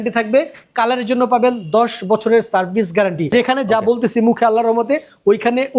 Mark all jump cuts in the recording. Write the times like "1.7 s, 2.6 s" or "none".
3.3 s